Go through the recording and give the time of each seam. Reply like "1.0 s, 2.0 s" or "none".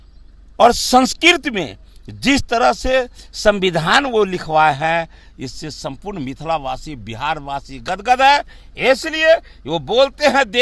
none